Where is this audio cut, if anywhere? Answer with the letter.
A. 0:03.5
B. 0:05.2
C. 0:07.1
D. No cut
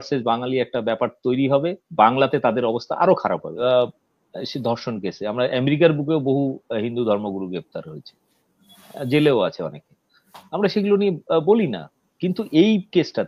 A